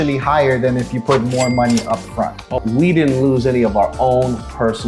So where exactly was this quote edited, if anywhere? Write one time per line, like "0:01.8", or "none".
0:02.5